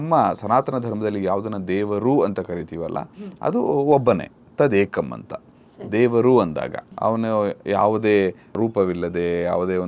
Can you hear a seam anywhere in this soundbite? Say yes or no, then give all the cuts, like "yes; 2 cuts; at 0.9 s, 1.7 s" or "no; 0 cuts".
no; 0 cuts